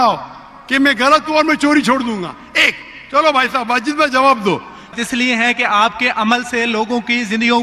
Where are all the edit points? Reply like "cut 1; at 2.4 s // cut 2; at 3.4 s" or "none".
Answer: cut 1; at 4.9 s